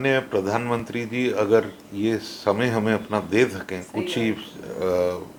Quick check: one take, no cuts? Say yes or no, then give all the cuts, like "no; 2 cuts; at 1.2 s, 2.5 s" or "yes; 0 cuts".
yes; 0 cuts